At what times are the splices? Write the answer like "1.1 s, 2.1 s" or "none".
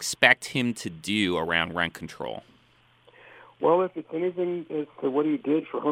none